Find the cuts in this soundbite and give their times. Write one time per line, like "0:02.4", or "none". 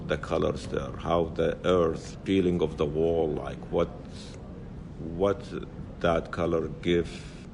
none